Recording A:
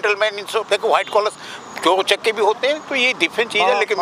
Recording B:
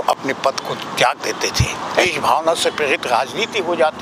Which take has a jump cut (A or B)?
B